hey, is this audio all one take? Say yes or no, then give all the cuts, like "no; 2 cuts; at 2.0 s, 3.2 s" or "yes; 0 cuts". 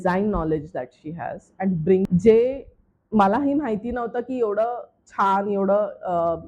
no; 1 cut; at 2.1 s